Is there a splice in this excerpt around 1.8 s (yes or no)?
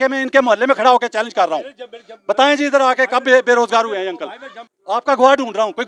no